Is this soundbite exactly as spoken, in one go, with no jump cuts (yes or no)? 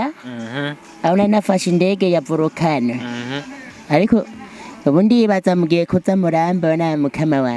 yes